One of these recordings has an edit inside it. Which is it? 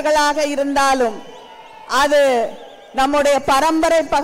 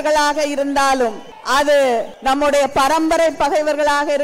second; 2 cuts; at 1.3 s, 2.1 s

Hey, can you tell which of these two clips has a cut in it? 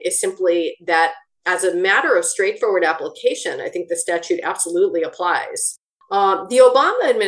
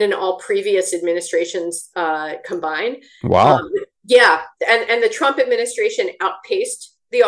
first; 1 cut; at 5.7 s

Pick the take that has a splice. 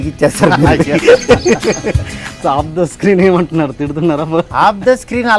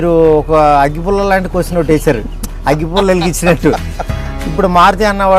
first; 2 cuts; at 2.3 s, 4.5 s

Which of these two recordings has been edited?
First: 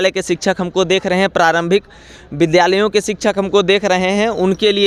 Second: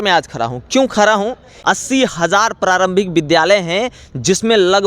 second; 1 cut; at 1.5 s

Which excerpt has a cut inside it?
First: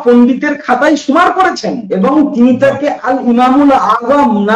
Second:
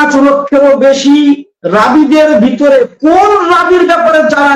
first; 1 cut; at 1.8 s

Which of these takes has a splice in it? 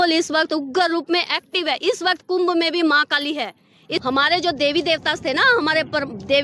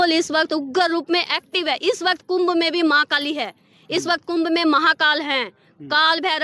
first; 1 cut; at 3.9 s

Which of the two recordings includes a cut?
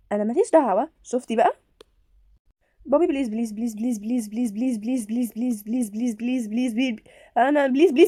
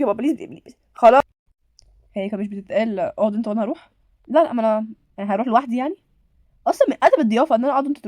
second; 1 cut; at 1.2 s

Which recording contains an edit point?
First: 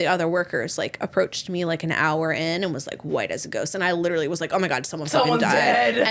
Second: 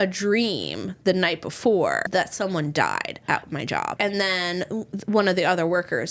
second; 2 cuts; at 2.1 s, 3.9 s

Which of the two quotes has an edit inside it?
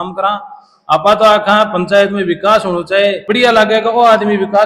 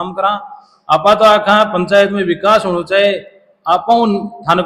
first; 1 cut; at 3.2 s

